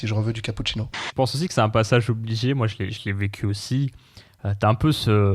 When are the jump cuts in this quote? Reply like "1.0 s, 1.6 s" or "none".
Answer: 1.0 s

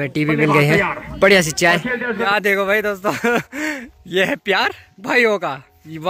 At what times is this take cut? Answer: 2.3 s

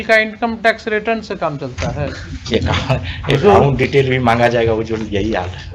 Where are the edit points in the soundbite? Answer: none

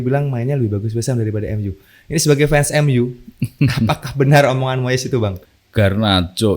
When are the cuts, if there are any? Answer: 5.4 s

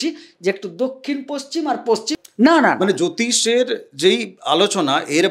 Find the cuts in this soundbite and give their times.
2.2 s

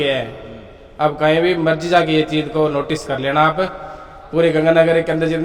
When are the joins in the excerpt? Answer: none

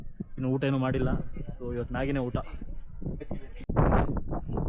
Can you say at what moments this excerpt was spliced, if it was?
none

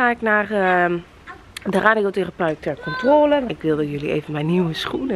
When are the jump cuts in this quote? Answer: 3.5 s

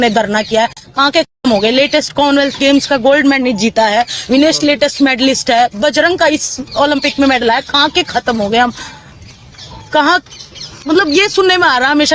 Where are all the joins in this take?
none

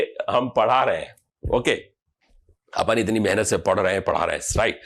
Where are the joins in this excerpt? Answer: none

